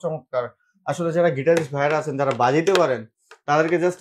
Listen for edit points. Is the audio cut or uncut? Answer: uncut